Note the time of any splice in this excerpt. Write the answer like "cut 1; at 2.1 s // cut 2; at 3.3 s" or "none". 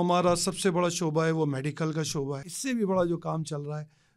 cut 1; at 2.5 s